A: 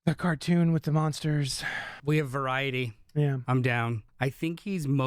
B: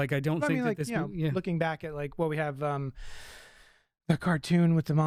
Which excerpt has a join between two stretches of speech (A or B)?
A